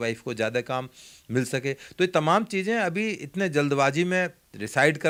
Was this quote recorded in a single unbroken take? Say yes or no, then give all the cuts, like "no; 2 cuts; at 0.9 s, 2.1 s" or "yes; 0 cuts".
yes; 0 cuts